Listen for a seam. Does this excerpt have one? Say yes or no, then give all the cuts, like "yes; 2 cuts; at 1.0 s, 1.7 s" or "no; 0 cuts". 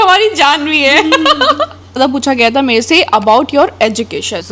yes; 1 cut; at 2.0 s